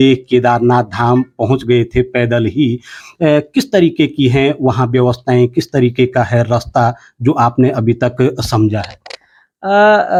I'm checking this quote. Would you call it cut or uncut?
uncut